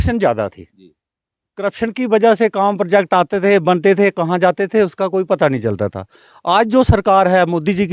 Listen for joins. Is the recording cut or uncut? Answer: uncut